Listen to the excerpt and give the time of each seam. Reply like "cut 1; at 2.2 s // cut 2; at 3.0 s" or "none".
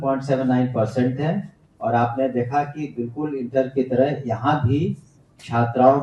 none